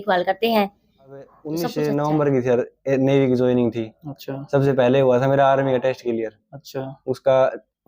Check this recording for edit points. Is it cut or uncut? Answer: cut